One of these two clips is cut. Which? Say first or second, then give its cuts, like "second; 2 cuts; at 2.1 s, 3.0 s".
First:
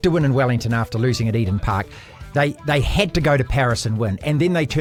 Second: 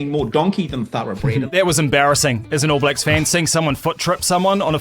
second; 1 cut; at 1.5 s